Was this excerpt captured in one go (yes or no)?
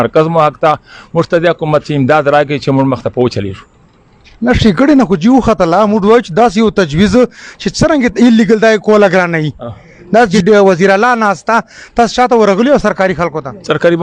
yes